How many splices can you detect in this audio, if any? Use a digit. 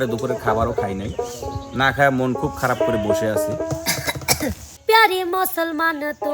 1